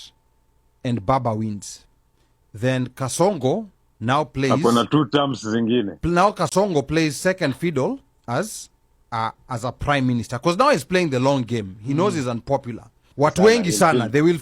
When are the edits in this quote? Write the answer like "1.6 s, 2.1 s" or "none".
13.0 s